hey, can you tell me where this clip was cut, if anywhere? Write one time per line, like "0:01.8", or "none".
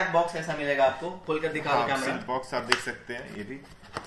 none